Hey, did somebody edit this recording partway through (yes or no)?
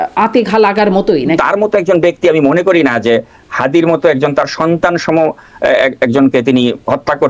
yes